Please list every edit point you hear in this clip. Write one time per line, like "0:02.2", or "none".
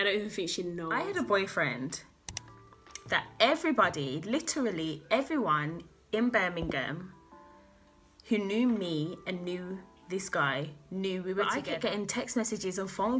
0:01.0
0:11.5